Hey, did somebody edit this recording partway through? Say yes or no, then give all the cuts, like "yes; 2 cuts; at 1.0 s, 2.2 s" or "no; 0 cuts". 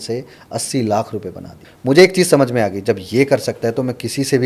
yes; 1 cut; at 1.6 s